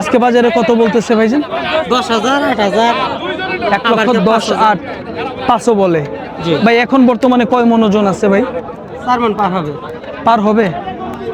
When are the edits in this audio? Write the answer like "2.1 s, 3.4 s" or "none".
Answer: none